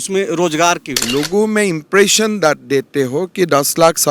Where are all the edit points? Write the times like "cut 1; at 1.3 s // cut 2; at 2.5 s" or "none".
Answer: cut 1; at 0.9 s